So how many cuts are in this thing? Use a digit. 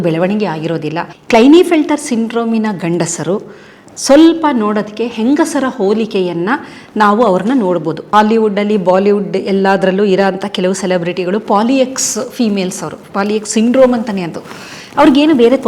2